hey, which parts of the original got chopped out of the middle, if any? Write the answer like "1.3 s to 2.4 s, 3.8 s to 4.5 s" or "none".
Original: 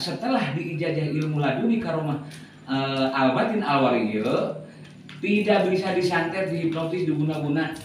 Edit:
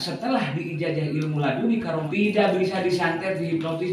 2.1 s to 5.2 s